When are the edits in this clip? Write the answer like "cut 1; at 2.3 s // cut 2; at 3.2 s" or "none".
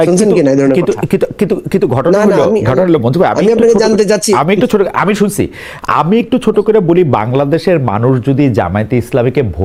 none